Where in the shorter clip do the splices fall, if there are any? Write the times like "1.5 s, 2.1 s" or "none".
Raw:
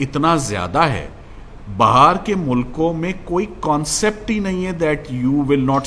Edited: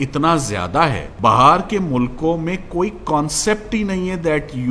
1.1 s